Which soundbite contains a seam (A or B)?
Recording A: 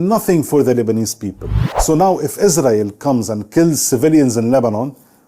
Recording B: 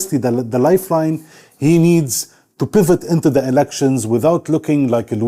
A